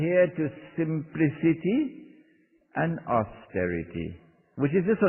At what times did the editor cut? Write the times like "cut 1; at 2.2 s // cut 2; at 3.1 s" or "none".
cut 1; at 3.7 s